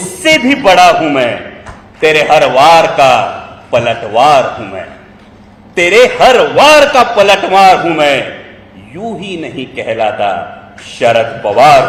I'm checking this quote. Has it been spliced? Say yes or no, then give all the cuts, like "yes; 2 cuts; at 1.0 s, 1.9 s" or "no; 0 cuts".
no; 0 cuts